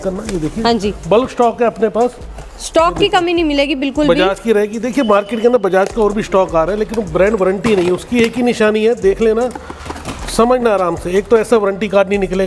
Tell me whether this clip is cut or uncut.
uncut